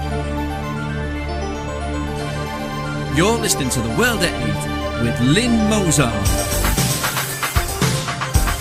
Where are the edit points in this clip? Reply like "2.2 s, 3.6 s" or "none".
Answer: none